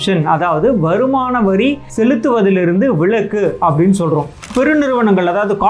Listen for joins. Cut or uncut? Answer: cut